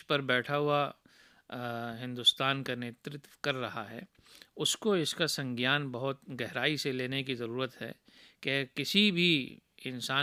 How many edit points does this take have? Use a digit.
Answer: 0